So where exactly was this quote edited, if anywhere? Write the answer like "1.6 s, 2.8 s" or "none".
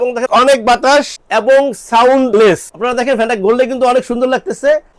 none